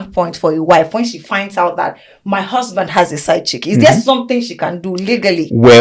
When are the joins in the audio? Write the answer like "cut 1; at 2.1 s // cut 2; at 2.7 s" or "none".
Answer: none